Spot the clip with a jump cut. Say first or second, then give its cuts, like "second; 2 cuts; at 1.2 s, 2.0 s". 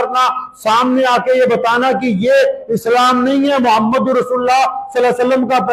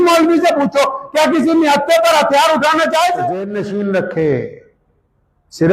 second; 1 cut; at 3.5 s